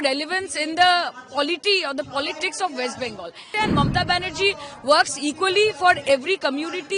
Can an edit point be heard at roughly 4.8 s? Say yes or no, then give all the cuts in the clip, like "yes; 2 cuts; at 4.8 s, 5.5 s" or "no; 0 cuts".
no; 1 cut; at 3.4 s